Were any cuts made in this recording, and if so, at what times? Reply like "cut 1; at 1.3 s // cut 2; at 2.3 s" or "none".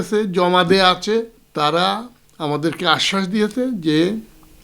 cut 1; at 1.4 s

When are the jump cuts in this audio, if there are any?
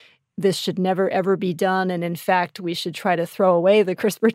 none

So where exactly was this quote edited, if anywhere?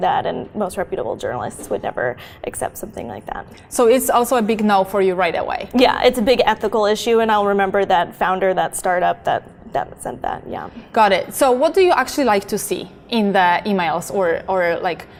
none

